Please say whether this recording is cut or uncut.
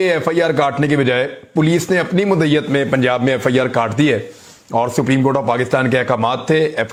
uncut